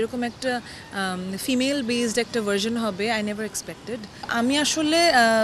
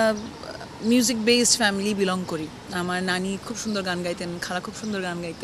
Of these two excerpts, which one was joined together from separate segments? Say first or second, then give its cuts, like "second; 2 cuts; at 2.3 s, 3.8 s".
first; 1 cut; at 4.2 s